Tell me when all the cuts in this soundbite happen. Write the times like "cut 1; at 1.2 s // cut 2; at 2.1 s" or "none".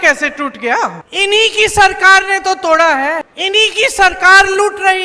cut 1; at 1.0 s // cut 2; at 3.3 s